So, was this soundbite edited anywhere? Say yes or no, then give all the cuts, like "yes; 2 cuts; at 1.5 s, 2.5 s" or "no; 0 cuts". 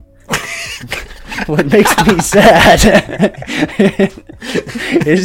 no; 0 cuts